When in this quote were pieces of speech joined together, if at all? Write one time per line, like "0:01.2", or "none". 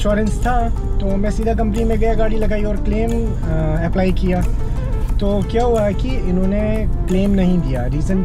none